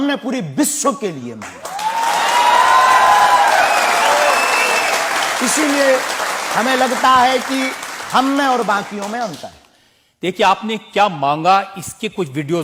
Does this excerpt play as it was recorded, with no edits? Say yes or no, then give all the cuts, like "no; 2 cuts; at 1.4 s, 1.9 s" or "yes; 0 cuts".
yes; 0 cuts